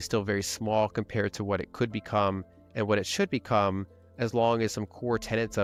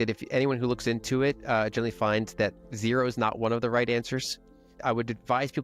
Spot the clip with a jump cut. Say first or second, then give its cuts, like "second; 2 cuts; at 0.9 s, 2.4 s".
second; 2 cuts; at 2.6 s, 4.7 s